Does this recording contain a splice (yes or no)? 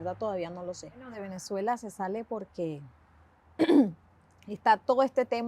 yes